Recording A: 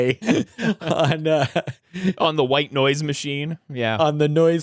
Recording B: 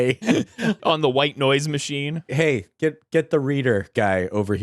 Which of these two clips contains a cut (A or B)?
B